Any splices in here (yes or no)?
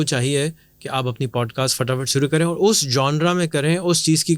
no